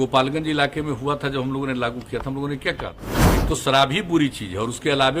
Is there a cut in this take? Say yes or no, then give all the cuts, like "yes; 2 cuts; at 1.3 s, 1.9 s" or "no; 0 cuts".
yes; 1 cut; at 3.4 s